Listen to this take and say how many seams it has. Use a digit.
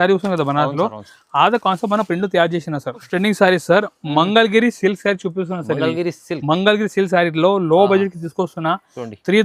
1